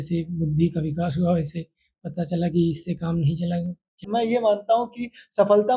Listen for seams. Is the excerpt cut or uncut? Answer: cut